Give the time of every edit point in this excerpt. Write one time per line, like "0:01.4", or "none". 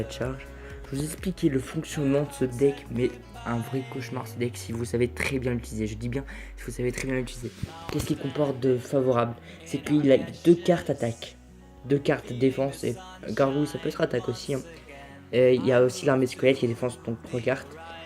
0:02.3